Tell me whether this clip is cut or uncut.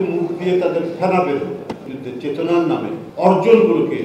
cut